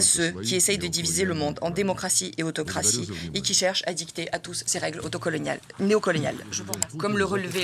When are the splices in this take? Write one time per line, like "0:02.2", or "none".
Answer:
0:06.5